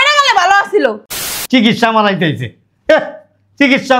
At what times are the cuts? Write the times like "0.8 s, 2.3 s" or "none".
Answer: 1.3 s

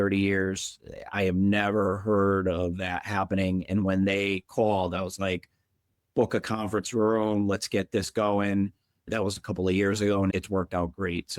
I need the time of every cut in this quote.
9.1 s

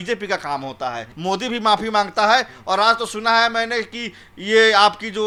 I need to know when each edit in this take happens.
none

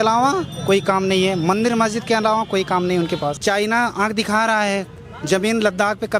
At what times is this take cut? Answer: 3.4 s

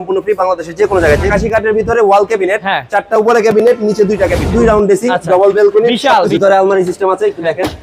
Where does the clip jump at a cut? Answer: 1.3 s, 4.5 s, 6.3 s

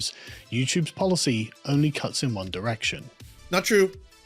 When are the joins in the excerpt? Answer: 3.3 s

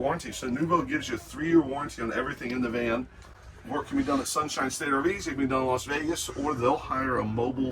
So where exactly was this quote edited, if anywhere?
none

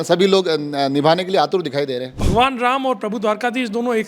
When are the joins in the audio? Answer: 2.2 s

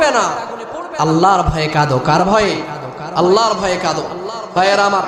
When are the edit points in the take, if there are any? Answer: none

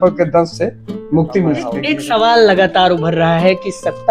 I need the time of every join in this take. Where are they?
1.8 s

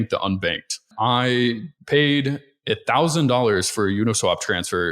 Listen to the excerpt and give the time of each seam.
0.9 s, 1.7 s

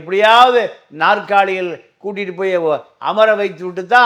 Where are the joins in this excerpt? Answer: none

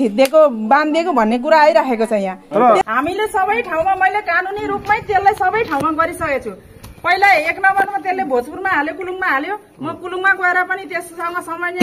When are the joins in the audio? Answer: 2.9 s

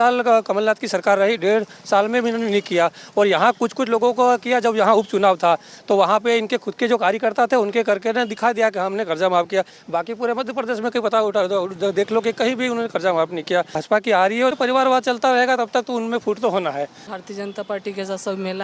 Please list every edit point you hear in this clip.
13.8 s, 14.5 s, 17.0 s

